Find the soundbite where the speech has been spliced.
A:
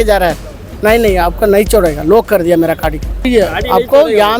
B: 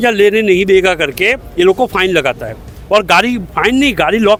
A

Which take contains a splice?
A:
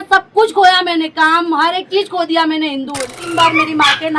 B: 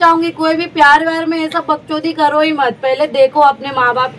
A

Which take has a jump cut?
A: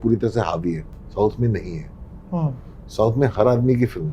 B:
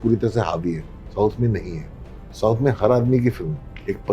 B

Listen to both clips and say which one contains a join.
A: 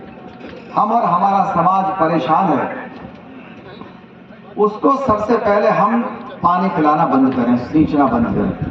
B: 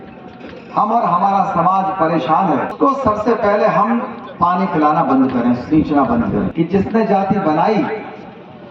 B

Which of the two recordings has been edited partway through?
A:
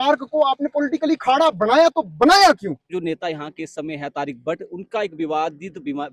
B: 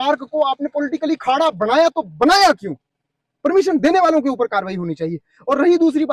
A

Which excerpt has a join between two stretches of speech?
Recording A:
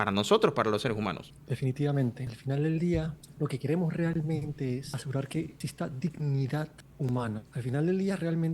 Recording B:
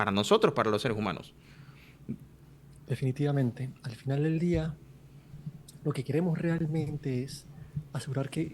A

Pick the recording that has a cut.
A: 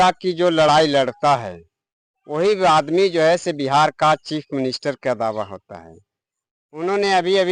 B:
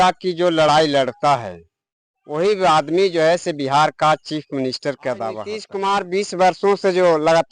B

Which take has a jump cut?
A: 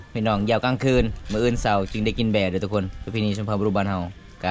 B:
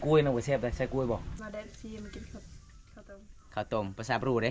B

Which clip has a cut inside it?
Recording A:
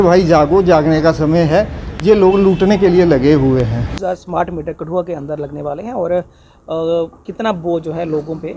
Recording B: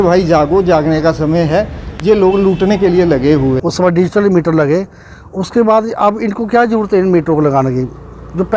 B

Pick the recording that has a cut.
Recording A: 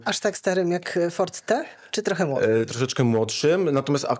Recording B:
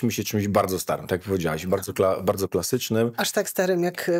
A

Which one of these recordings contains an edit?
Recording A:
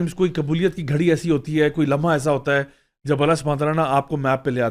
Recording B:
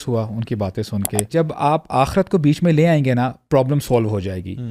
B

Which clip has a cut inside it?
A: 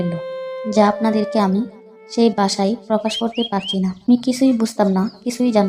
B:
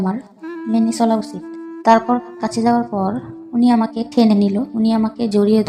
A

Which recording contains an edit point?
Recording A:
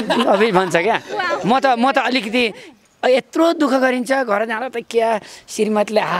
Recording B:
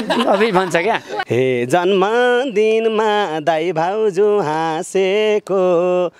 B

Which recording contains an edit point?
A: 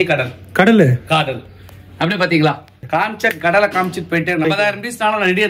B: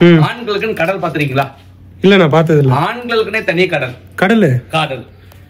A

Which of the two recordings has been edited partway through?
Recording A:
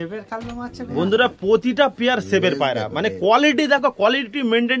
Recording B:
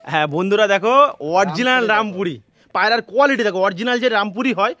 B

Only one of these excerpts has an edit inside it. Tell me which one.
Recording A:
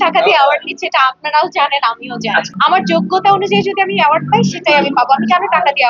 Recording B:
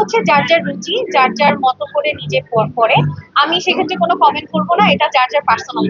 A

